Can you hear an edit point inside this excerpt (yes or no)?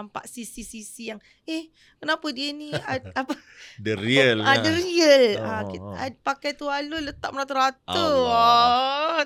no